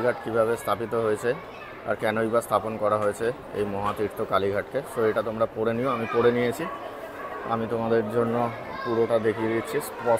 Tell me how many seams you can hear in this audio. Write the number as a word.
zero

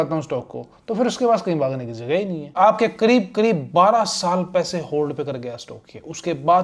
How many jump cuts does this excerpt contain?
one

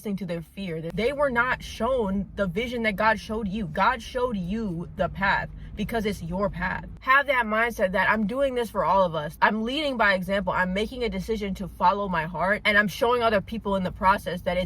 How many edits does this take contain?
three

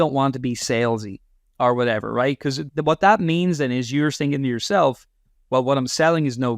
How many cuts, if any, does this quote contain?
one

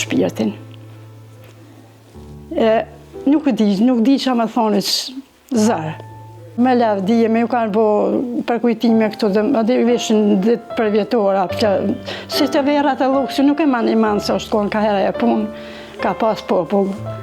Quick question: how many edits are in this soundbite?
zero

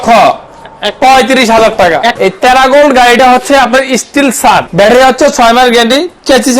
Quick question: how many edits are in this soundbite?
two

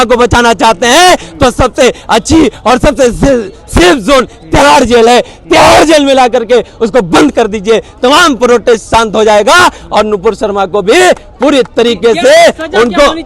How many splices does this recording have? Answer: zero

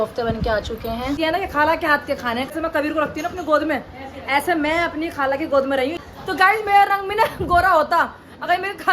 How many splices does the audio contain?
three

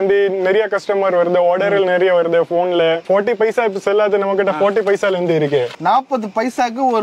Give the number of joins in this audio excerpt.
two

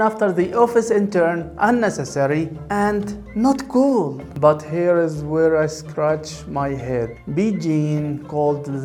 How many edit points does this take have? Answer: zero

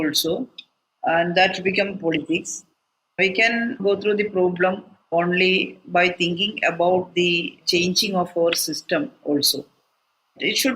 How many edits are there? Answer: one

